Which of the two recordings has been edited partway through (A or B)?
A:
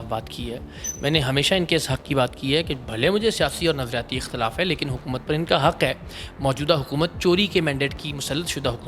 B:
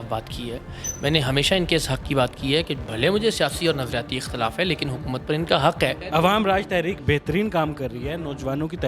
B